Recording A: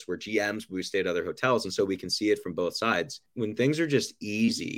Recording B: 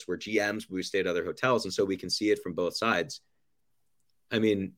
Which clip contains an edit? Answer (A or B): A